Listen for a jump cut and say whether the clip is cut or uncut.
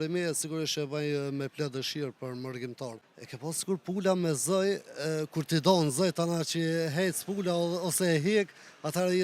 cut